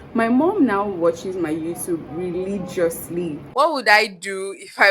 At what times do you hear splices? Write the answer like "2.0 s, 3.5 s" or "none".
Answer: 3.4 s